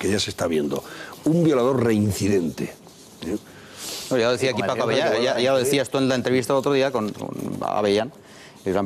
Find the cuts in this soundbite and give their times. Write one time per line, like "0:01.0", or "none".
0:01.6